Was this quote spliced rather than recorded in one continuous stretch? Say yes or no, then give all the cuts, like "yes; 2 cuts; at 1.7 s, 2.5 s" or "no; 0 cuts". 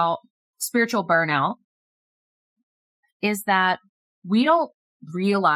no; 0 cuts